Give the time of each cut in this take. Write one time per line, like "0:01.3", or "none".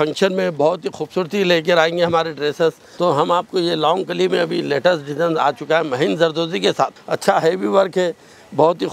0:02.9
0:07.0